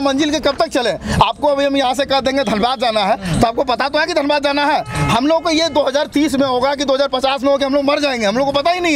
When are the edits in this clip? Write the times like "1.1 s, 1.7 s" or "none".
none

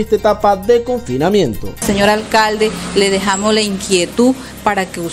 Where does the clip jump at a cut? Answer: 1.8 s

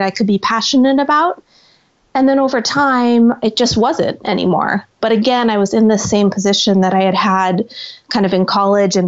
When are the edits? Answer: 3.4 s, 5.0 s

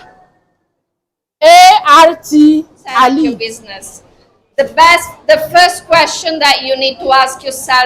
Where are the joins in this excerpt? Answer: 3.4 s

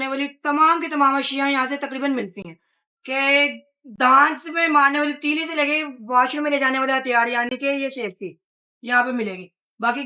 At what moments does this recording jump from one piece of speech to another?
none

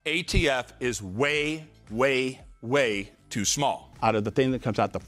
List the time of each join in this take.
3.9 s

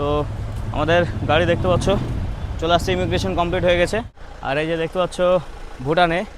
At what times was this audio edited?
4.2 s

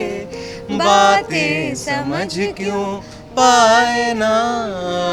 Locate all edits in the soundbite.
none

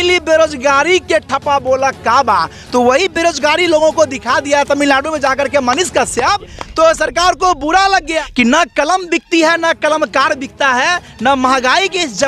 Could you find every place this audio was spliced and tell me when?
8.2 s

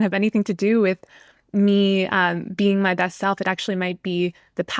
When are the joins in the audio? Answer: none

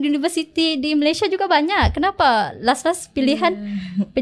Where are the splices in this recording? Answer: none

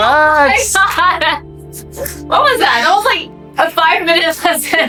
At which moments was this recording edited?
none

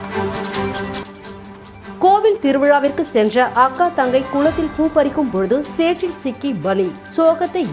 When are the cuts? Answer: 1.0 s

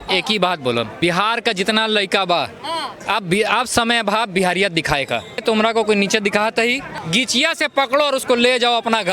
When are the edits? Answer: 0.9 s, 5.4 s

